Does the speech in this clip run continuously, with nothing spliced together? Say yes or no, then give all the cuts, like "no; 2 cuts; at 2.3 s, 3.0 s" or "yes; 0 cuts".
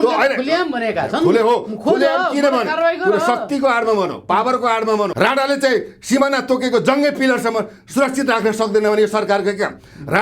no; 1 cut; at 5.1 s